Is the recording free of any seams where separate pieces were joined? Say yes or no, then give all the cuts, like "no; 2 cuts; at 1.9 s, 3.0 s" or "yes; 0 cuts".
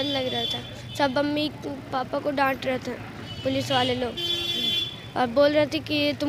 yes; 0 cuts